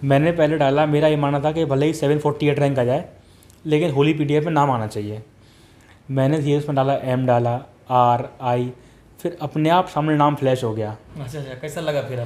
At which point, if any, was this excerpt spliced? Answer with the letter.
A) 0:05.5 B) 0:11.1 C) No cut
C